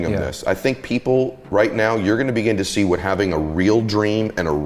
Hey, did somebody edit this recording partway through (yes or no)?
no